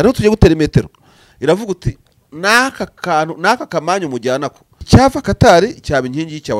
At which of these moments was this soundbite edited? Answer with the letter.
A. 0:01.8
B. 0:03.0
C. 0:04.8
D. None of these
C